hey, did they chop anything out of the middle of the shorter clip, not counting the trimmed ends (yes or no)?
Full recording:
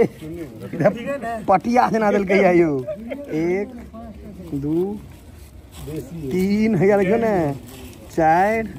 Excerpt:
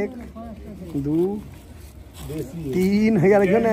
no